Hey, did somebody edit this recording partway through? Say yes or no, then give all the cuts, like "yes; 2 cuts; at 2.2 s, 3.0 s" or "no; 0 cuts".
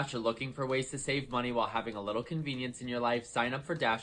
no; 0 cuts